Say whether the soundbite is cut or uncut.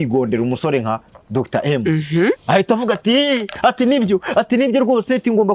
cut